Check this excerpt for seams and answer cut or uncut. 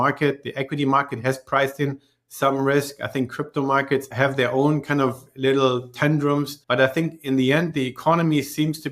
cut